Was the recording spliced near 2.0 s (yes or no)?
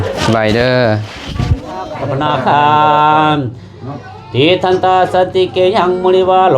yes